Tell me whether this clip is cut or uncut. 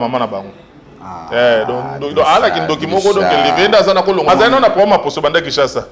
cut